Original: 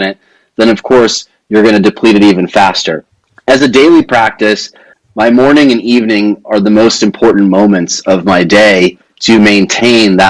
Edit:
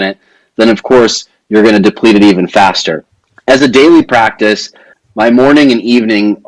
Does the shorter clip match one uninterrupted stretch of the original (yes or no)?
yes